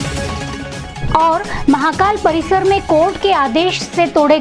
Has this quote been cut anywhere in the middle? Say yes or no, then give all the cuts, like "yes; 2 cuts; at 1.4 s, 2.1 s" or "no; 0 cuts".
no; 0 cuts